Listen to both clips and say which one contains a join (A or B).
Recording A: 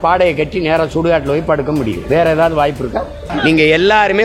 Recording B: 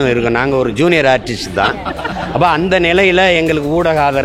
A